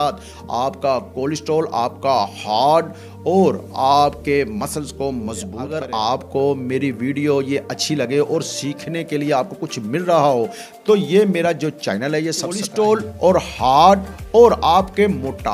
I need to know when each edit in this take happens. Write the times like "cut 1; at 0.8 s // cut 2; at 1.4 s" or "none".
cut 1; at 5.8 s // cut 2; at 12.6 s